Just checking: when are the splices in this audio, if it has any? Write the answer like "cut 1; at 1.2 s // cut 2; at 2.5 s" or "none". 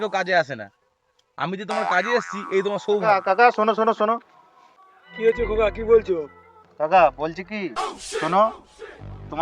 cut 1; at 3.1 s